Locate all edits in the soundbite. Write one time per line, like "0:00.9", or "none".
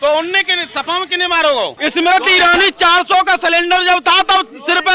0:01.8